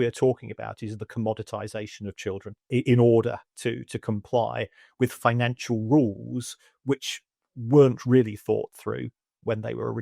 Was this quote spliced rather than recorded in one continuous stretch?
yes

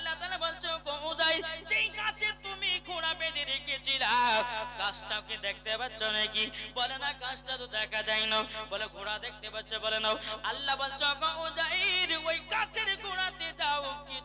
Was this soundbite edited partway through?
no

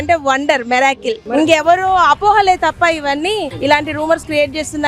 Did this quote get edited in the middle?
yes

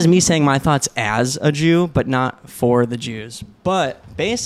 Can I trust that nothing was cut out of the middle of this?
yes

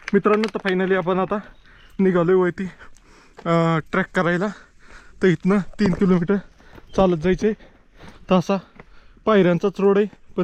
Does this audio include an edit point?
no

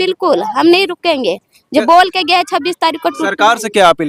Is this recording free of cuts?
yes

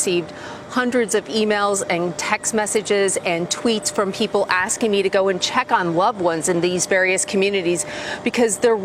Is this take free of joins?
yes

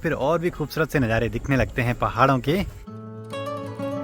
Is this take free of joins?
yes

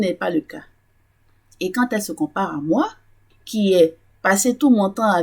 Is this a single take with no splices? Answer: no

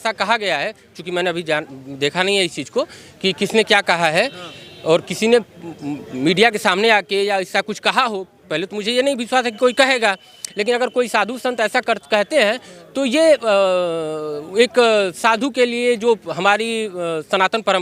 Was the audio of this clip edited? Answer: no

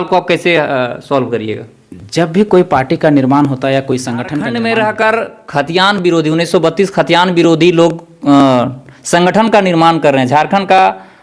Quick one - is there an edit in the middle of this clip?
yes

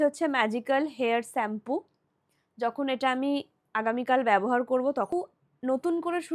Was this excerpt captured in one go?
no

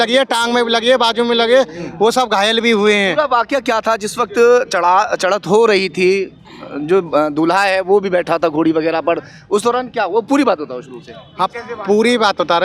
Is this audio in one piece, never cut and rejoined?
yes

